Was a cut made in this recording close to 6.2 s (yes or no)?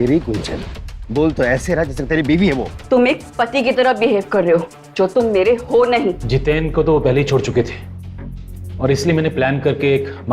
yes